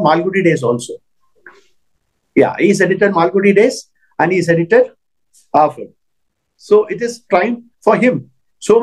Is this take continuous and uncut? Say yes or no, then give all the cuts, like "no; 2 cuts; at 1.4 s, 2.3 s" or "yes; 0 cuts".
yes; 0 cuts